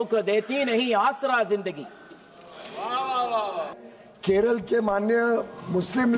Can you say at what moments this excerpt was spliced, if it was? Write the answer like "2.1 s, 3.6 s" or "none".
3.8 s